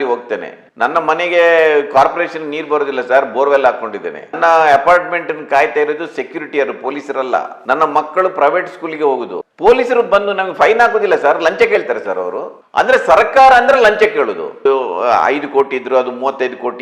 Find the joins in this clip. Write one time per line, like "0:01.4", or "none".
0:09.3
0:14.6